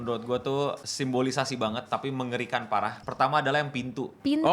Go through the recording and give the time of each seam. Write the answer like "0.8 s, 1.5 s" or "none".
0.8 s, 3.0 s

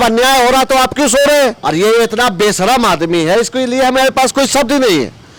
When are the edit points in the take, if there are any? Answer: 1.6 s

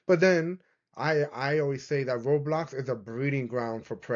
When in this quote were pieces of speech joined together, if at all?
none

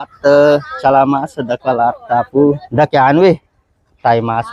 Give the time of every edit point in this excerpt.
2.6 s

